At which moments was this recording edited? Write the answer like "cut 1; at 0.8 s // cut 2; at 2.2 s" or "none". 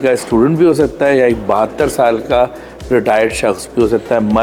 none